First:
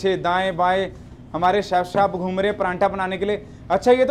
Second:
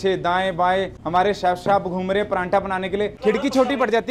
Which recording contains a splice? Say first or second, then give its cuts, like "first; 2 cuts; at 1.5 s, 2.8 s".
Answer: second; 2 cuts; at 1.0 s, 3.1 s